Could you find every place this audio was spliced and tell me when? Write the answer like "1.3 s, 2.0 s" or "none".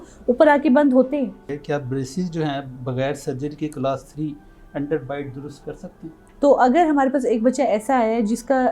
1.5 s, 6.2 s